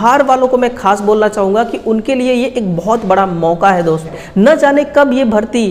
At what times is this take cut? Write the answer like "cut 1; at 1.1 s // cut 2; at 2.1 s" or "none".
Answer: cut 1; at 4.2 s

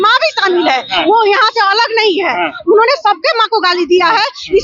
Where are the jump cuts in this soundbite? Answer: none

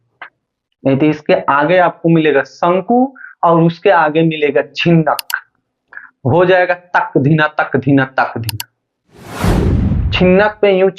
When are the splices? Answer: cut 1; at 9.2 s // cut 2; at 10.1 s

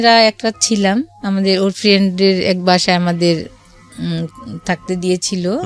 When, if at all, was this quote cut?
none

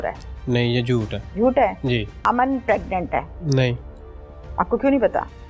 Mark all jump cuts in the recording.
cut 1; at 1.2 s // cut 2; at 2.1 s // cut 3; at 3.4 s

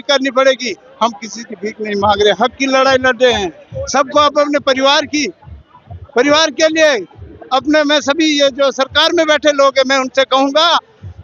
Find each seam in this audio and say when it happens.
none

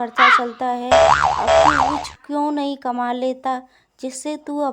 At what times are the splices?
cut 1; at 2.1 s

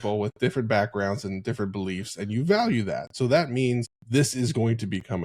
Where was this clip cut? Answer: cut 1; at 4.0 s

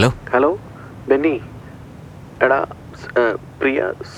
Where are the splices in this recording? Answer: none

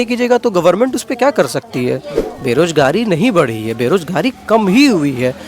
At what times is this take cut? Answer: cut 1; at 2.1 s

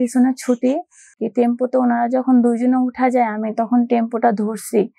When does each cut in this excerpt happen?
cut 1; at 1.2 s

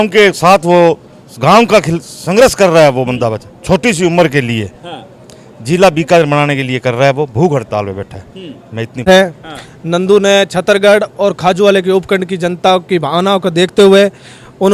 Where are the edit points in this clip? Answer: cut 1; at 9.0 s

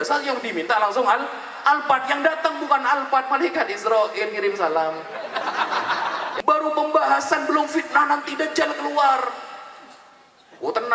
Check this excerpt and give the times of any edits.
cut 1; at 6.3 s

